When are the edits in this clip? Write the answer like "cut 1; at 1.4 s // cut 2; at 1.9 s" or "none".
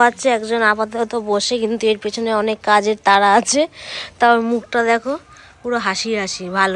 none

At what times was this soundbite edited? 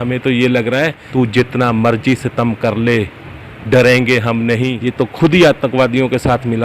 cut 1; at 1.0 s // cut 2; at 4.8 s

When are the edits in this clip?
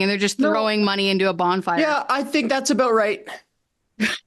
none

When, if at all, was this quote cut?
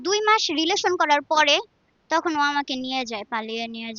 none

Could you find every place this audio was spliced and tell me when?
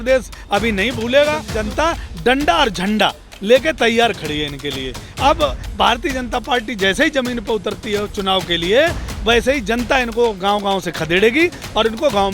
cut 1; at 1.5 s

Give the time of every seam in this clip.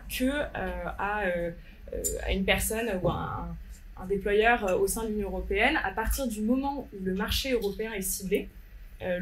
none

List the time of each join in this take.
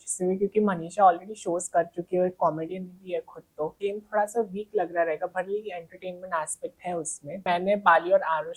cut 1; at 3.8 s // cut 2; at 7.4 s

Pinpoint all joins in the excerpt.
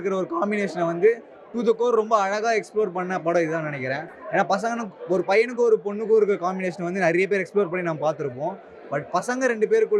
none

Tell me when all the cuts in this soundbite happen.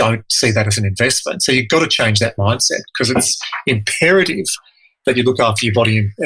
none

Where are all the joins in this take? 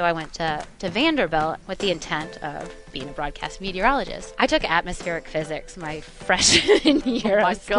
cut 1; at 1.6 s // cut 2; at 4.2 s

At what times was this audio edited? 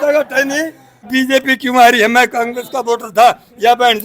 cut 1; at 1.0 s

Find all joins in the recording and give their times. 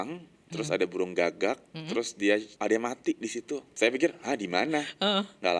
cut 1; at 2.5 s // cut 2; at 3.7 s

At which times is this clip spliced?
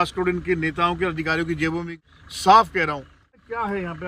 cut 1; at 1.9 s // cut 2; at 3.3 s

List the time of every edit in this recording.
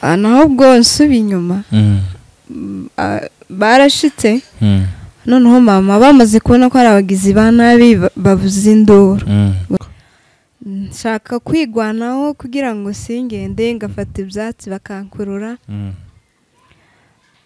cut 1; at 9.8 s

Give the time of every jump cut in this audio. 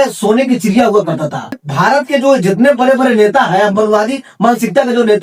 cut 1; at 1.7 s

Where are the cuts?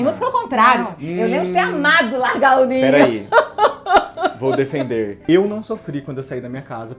none

